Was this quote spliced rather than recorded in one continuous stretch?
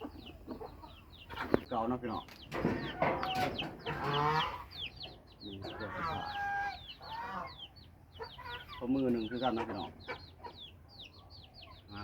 yes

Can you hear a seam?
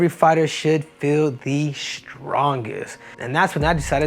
yes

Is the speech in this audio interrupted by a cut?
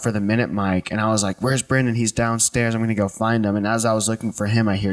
no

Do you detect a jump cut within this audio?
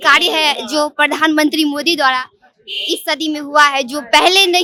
no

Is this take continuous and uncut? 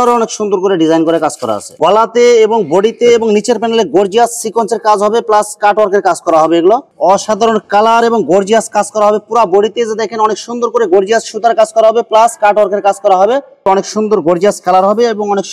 no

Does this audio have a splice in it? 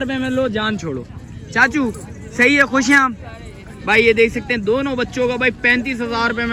no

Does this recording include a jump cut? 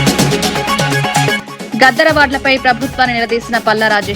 yes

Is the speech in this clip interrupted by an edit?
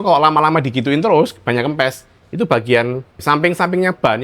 yes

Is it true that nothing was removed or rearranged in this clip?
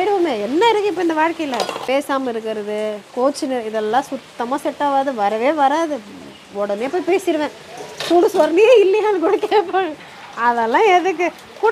no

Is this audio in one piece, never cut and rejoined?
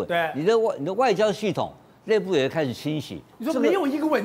no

